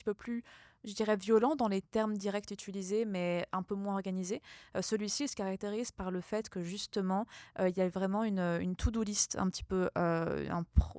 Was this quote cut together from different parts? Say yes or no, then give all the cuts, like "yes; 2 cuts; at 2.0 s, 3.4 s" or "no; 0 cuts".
no; 0 cuts